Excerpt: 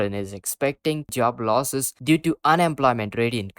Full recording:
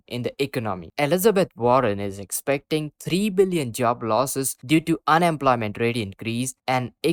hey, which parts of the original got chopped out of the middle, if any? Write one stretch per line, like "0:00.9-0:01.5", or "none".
0:02.9-0:03.7